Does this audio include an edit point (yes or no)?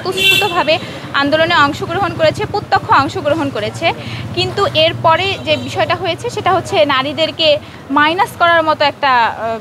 no